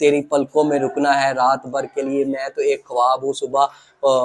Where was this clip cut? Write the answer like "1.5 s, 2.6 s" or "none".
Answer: none